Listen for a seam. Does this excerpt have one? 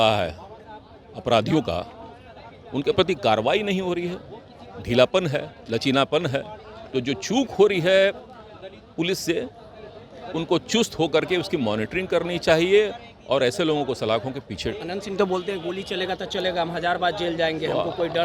no; 0 cuts

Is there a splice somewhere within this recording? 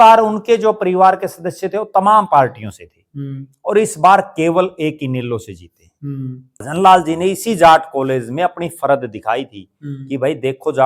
yes; 1 cut; at 6.7 s

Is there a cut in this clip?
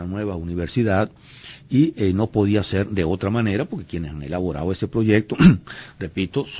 no; 0 cuts

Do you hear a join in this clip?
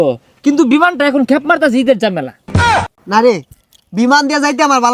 no; 0 cuts

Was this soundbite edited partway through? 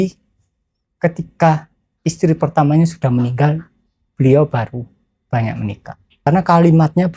yes; 1 cut; at 6.3 s

